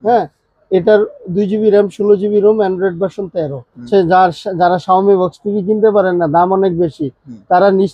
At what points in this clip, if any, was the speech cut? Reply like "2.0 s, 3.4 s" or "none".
3.8 s